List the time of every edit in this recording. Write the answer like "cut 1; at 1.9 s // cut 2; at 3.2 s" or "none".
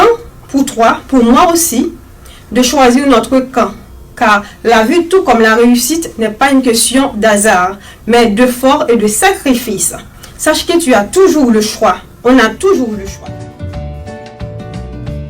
cut 1; at 13.1 s